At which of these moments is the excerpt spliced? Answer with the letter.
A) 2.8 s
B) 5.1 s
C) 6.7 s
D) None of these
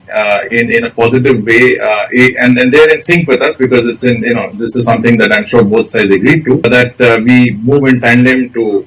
C